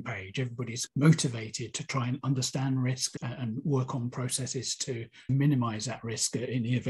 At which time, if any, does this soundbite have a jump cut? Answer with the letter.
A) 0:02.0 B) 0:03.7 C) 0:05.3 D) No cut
C